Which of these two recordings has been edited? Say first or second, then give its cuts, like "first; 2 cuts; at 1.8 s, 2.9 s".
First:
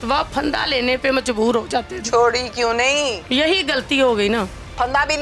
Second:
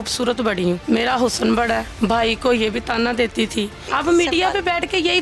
second; 3 cuts; at 0.8 s, 1.9 s, 3.9 s